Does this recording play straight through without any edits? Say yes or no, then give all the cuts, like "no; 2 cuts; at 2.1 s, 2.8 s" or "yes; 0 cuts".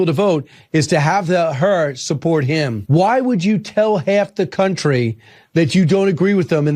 no; 1 cut; at 2.8 s